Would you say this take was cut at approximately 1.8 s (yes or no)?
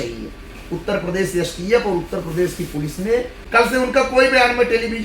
no